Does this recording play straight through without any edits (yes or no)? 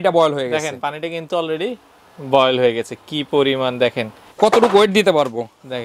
no